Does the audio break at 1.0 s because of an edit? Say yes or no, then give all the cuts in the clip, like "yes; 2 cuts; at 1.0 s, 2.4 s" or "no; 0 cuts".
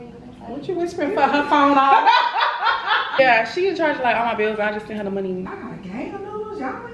no; 2 cuts; at 3.1 s, 5.5 s